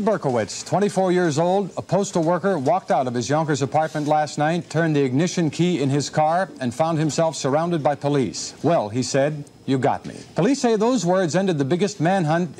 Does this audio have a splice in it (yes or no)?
yes